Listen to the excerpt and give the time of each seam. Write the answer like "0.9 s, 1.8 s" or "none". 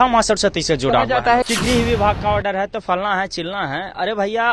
1.5 s